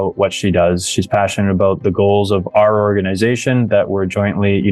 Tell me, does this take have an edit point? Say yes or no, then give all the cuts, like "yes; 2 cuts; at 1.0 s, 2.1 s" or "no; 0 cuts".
no; 0 cuts